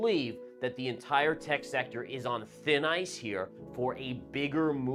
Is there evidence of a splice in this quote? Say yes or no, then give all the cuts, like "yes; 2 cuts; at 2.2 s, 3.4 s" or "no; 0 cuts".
no; 0 cuts